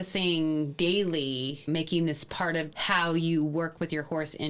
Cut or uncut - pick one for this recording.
cut